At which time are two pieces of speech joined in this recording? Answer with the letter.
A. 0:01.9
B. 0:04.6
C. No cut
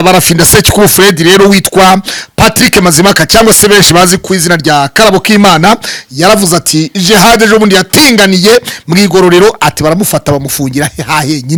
C